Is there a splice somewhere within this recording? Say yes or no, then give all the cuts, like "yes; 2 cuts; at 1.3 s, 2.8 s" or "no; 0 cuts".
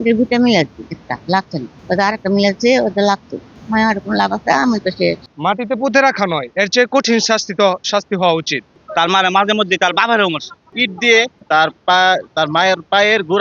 yes; 4 cuts; at 3.5 s, 5.3 s, 8.6 s, 10.7 s